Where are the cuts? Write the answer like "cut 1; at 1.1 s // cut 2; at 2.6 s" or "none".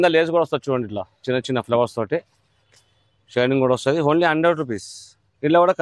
none